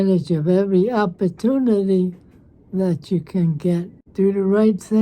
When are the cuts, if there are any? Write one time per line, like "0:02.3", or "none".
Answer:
0:04.1